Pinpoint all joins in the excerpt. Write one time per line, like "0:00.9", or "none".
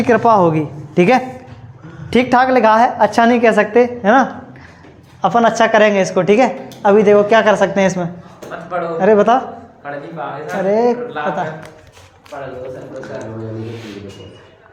none

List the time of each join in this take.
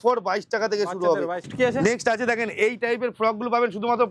0:01.4

